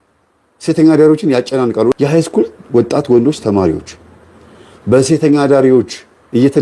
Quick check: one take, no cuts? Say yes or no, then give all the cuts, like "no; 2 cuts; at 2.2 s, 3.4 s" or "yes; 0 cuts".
no; 1 cut; at 1.9 s